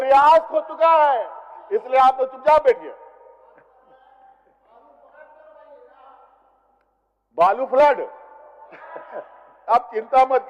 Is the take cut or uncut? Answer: uncut